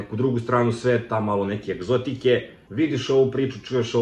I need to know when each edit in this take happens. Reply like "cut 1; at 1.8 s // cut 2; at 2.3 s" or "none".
cut 1; at 2.6 s